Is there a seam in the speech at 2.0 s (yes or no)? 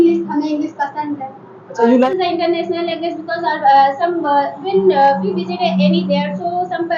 yes